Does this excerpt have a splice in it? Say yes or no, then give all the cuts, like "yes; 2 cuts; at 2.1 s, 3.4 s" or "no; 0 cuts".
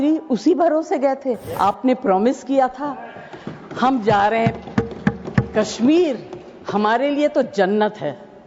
yes; 1 cut; at 1.5 s